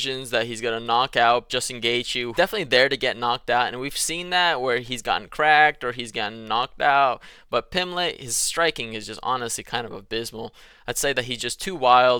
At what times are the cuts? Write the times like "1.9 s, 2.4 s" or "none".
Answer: none